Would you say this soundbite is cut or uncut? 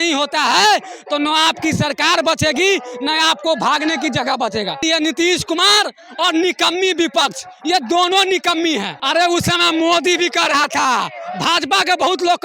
cut